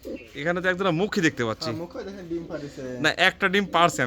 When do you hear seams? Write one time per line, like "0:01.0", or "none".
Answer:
none